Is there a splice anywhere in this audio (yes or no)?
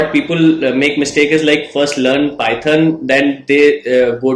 no